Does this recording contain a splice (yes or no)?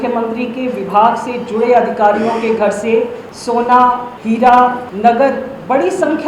yes